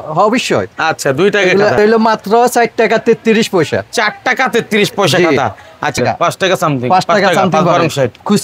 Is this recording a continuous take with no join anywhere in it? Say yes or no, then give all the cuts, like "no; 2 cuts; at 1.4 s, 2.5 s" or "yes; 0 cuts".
no; 2 cuts; at 1.8 s, 6.0 s